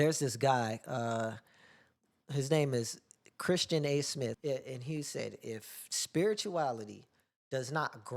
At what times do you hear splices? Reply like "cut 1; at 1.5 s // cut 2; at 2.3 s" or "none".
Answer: cut 1; at 4.4 s